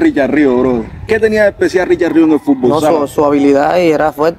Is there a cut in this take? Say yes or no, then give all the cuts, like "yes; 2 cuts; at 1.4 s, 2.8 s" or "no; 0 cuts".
yes; 1 cut; at 0.9 s